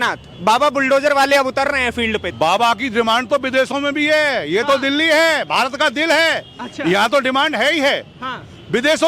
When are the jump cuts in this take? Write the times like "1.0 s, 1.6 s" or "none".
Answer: 2.3 s